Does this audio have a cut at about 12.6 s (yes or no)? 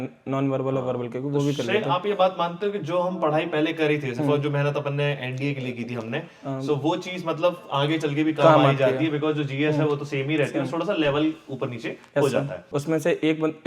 yes